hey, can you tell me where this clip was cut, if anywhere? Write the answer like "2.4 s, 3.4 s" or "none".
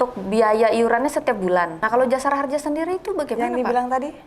1.8 s